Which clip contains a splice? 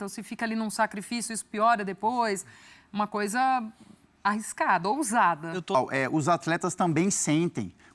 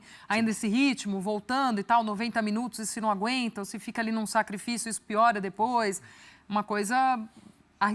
first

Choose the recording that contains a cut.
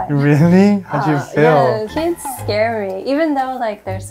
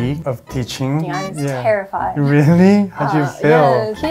second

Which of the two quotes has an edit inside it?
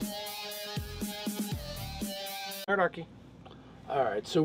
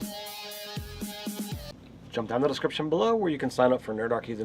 second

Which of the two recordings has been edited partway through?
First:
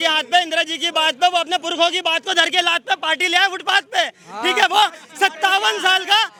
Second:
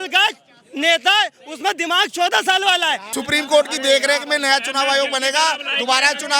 second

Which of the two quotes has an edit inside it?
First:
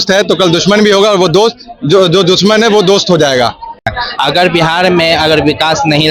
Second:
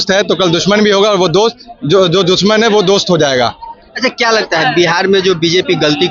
first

